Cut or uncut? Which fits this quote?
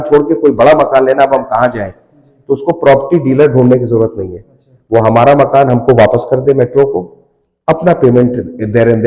uncut